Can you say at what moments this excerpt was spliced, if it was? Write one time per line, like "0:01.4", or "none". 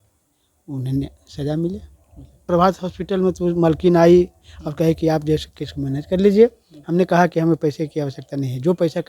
0:02.5